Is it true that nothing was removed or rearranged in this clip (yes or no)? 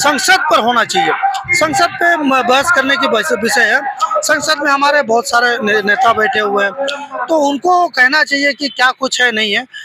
yes